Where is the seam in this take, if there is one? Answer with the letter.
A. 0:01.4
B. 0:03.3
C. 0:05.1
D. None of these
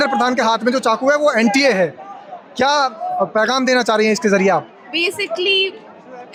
D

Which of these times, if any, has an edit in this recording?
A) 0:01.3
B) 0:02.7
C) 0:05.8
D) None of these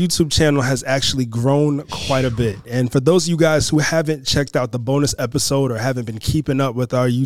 B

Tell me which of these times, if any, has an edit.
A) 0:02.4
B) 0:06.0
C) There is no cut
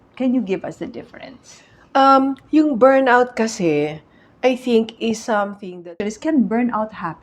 B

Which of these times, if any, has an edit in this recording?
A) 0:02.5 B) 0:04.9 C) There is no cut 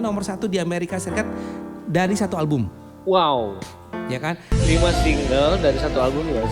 C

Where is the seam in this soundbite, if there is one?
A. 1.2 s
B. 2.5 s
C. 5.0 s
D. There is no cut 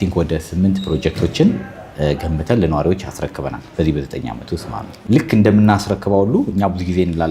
C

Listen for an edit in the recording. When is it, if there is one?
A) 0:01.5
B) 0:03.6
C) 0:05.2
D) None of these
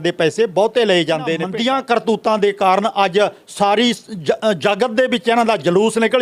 A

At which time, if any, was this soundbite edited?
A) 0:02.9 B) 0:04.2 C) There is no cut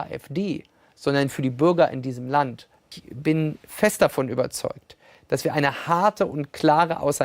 A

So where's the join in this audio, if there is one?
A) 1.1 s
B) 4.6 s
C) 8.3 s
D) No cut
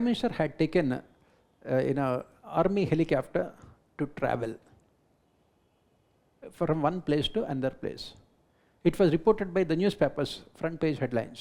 D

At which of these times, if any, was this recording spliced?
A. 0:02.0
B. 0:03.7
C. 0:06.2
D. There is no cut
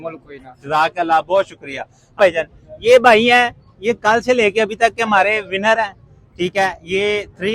A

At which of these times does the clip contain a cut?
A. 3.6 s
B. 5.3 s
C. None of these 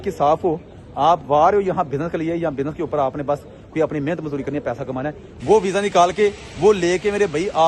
B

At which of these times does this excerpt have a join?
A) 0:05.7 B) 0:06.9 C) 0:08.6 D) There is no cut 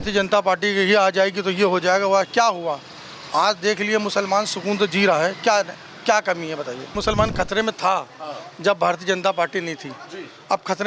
B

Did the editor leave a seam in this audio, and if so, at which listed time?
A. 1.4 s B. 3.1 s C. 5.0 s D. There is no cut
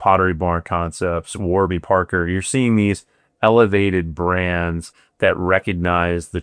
D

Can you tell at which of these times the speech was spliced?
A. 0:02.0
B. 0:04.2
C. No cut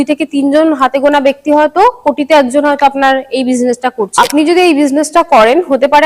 B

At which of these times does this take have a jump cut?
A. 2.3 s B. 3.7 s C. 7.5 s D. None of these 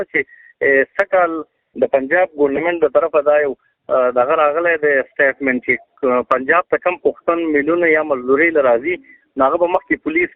D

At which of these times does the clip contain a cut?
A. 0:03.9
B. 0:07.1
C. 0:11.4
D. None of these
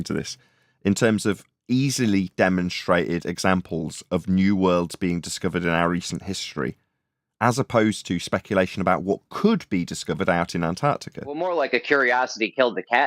C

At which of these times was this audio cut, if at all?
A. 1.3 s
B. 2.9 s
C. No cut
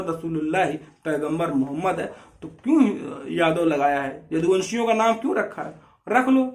C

